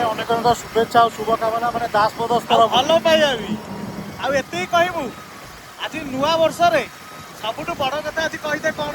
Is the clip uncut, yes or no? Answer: yes